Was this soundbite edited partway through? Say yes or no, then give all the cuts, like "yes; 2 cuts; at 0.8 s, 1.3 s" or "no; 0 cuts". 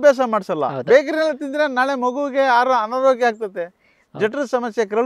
no; 0 cuts